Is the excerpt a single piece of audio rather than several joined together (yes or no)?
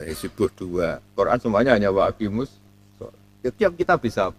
yes